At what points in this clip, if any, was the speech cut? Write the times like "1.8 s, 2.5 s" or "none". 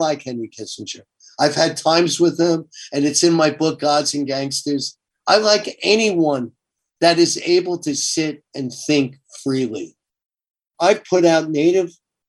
10.5 s